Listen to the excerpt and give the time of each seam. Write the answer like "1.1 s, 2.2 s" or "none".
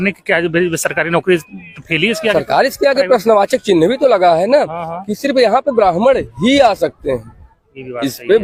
none